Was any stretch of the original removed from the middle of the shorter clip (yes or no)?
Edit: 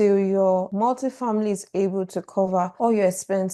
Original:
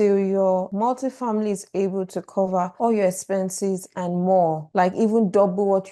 no